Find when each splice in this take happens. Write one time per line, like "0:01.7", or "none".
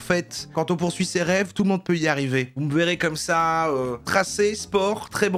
0:02.5